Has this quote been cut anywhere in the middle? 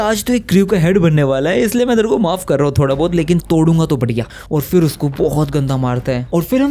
no; 0 cuts

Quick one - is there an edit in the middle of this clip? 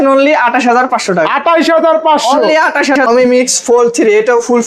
yes; 1 cut; at 3.0 s

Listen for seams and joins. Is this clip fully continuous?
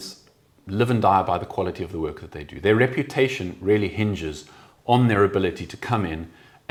yes; 0 cuts

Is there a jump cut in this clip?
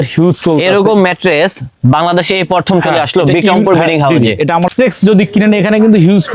yes; 1 cut; at 4.7 s

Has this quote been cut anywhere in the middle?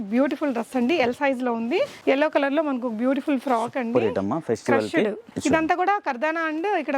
yes; 1 cut; at 1.9 s

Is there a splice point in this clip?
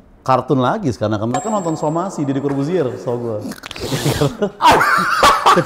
no; 0 cuts

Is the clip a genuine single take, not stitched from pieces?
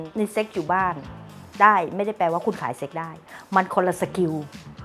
no; 1 cut; at 3.2 s

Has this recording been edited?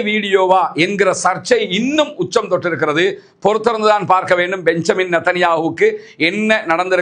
no; 0 cuts

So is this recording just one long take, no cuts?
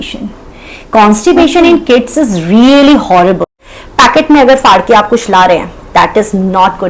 no; 1 cut; at 3.5 s

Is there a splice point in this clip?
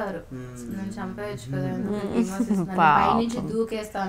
no; 0 cuts

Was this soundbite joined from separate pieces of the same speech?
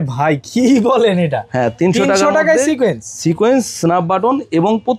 no; 0 cuts

